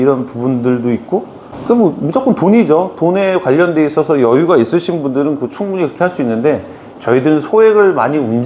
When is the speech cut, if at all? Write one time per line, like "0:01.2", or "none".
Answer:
none